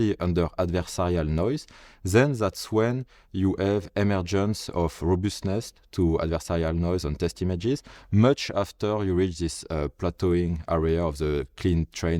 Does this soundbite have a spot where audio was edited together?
no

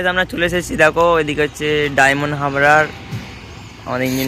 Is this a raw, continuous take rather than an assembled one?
yes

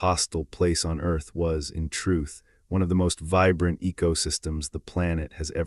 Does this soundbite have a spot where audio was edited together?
no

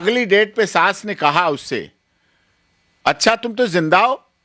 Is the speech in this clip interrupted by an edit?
no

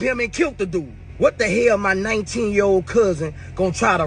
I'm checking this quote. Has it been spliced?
yes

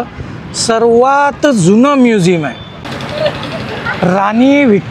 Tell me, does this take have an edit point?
yes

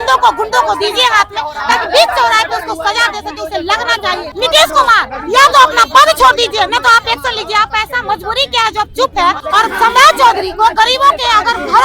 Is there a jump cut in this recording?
yes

